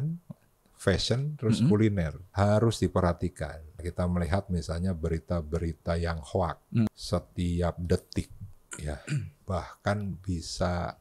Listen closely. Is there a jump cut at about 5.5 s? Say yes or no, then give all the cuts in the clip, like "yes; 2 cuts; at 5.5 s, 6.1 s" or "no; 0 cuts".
no; 4 cuts; at 2.2 s, 3.8 s, 6.9 s, 9.4 s